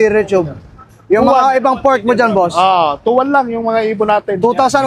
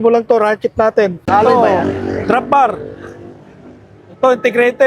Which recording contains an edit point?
second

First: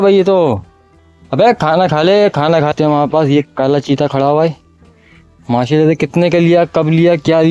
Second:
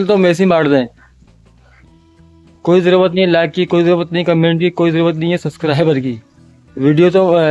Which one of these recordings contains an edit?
first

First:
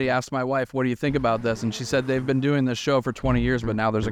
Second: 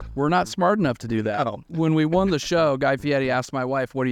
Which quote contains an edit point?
second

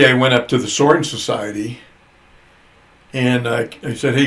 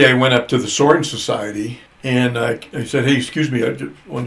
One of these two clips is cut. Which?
second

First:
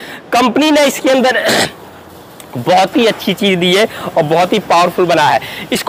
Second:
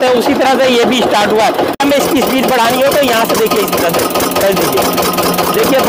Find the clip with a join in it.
second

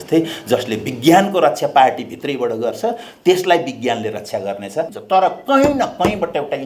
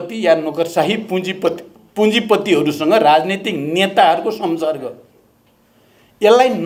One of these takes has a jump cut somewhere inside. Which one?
first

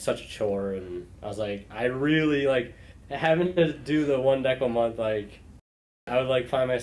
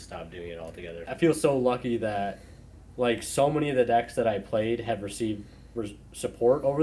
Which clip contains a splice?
second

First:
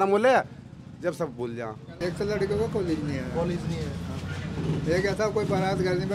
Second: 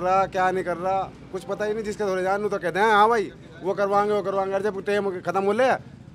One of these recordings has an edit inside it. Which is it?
first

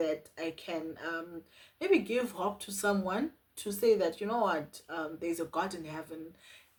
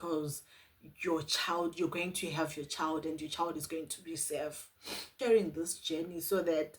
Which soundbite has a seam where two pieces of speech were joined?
second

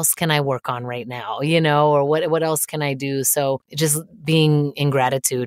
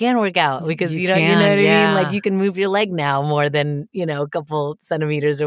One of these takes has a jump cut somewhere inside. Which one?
first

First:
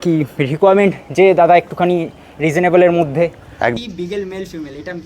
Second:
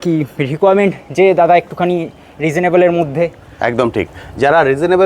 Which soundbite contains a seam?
first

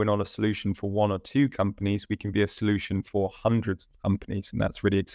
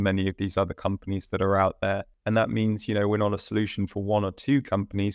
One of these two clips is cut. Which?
second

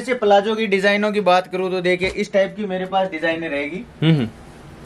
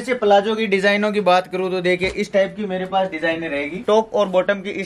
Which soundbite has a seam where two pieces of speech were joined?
second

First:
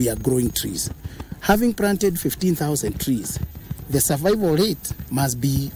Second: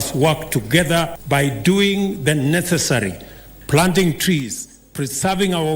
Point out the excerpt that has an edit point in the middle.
second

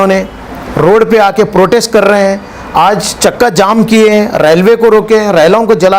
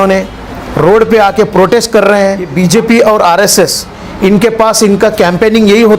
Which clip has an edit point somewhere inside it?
second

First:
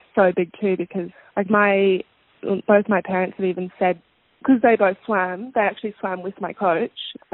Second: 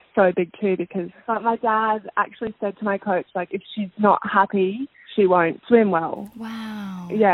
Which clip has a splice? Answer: second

